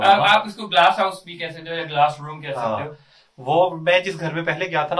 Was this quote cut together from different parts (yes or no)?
no